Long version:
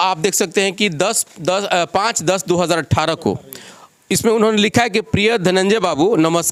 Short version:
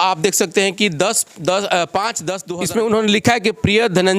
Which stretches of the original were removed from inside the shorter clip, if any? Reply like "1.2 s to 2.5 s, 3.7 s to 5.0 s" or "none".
2.3 s to 3.8 s